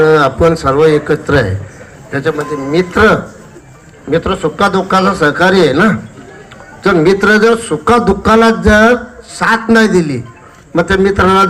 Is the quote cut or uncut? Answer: uncut